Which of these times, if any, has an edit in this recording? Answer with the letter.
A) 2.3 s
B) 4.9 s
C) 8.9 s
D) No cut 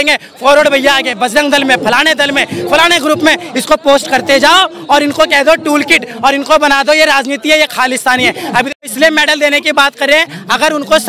C